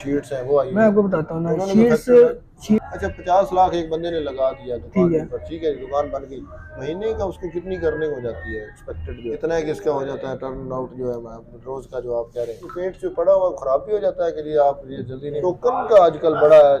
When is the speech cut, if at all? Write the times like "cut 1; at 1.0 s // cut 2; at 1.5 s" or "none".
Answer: cut 1; at 2.8 s // cut 2; at 9.4 s // cut 3; at 12.7 s // cut 4; at 15.4 s